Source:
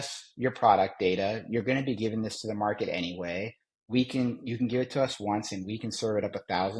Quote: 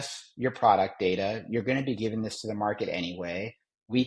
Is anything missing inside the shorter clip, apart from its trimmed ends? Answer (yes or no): no